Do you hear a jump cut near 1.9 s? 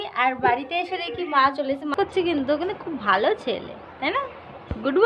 yes; 1 cut; at 1.9 s

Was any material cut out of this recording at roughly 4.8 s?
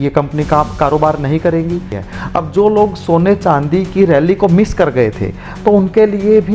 no; 1 cut; at 2.0 s

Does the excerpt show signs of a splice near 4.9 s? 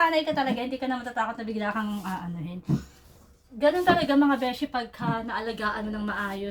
no; 1 cut; at 3.0 s

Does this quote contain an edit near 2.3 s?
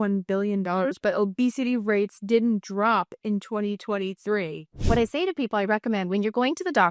no; 1 cut; at 4.7 s

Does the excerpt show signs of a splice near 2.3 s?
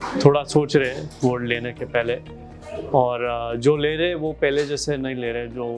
no; 0 cuts

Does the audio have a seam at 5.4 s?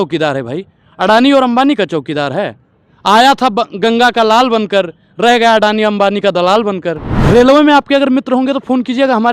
no; 1 cut; at 7.1 s

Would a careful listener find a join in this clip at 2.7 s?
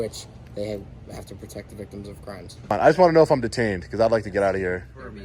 yes; 1 cut; at 2.7 s

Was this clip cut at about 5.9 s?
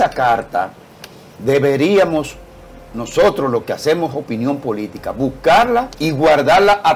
yes; 1 cut; at 5.9 s

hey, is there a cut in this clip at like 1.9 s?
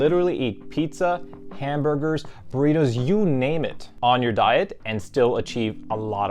no; 1 cut; at 3.8 s

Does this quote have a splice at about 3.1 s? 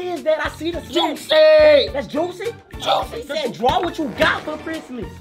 yes; 1 cut; at 3.1 s

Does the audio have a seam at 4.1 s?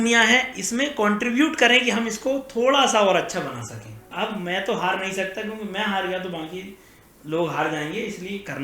yes; 1 cut; at 4.1 s

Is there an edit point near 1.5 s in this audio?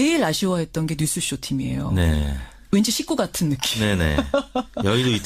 no; 1 cut; at 4.1 s

